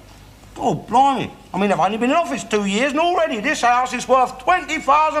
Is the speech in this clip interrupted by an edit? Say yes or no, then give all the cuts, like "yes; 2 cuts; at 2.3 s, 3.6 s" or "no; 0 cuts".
no; 0 cuts